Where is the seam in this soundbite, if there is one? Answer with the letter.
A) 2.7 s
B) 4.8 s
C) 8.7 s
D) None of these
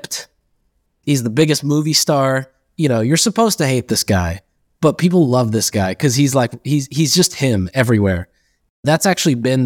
D